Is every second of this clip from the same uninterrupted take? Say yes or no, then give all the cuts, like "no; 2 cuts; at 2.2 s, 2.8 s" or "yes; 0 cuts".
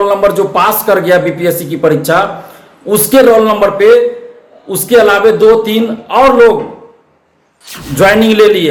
yes; 0 cuts